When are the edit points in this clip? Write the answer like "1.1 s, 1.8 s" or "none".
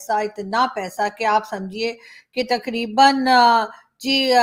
none